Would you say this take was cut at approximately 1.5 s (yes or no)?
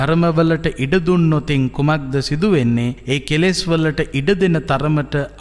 no